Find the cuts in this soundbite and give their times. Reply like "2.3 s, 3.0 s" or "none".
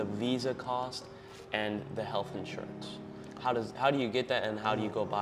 none